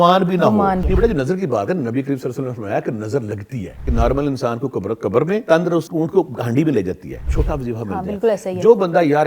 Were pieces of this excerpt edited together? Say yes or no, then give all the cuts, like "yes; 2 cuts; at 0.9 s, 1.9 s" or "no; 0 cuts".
yes; 4 cuts; at 0.8 s, 3.8 s, 5.6 s, 7.3 s